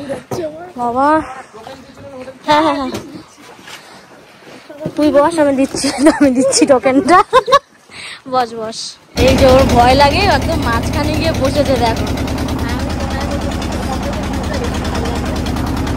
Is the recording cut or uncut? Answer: uncut